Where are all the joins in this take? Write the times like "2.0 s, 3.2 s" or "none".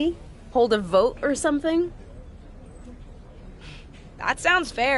1.9 s, 3.9 s